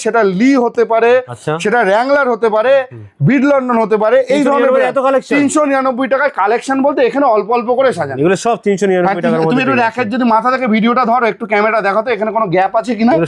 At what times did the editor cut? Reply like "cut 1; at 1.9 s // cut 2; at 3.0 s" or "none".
none